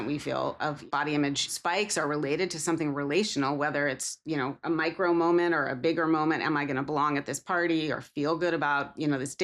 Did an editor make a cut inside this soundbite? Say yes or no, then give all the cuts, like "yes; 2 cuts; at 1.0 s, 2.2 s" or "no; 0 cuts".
yes; 2 cuts; at 0.8 s, 1.5 s